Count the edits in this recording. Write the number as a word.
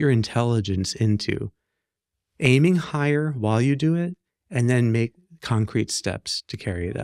zero